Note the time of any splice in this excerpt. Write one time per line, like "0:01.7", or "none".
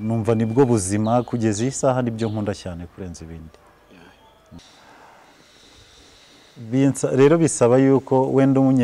0:04.6